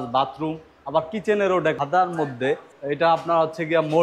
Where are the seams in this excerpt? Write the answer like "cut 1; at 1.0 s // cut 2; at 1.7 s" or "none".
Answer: cut 1; at 1.8 s // cut 2; at 2.7 s